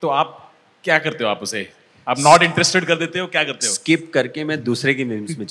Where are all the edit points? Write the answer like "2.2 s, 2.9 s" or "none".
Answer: none